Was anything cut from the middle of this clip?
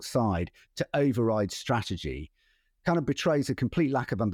no; 0 cuts

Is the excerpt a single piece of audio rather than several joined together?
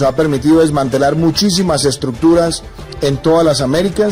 yes; 0 cuts

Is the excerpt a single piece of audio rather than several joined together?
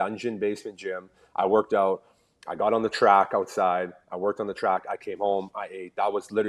yes; 0 cuts

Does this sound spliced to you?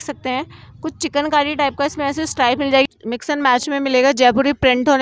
yes; 1 cut; at 2.8 s

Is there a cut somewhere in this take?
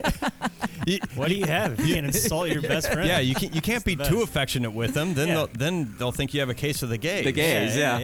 no; 0 cuts

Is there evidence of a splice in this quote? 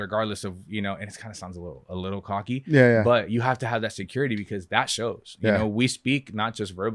no; 0 cuts

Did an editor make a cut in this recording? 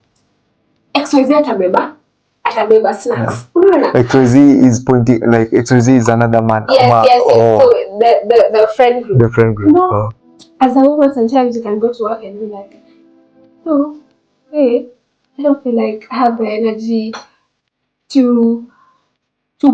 yes; 1 cut; at 10.1 s

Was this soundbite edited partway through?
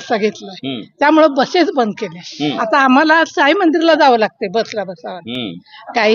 no; 0 cuts

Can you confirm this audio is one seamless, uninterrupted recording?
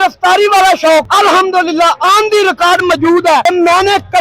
no; 2 cuts; at 1.1 s, 3.4 s

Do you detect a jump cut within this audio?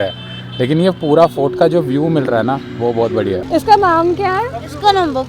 yes; 1 cut; at 3.4 s

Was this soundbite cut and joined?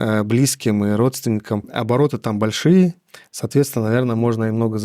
yes; 1 cut; at 1.7 s

